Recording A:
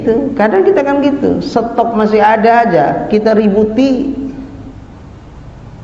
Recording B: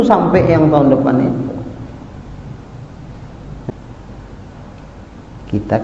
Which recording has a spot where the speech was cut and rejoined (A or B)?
B